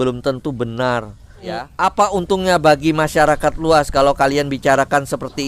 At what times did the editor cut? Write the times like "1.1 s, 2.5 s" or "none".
1.5 s